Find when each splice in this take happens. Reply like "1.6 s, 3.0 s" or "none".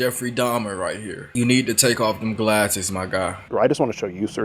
1.2 s, 3.5 s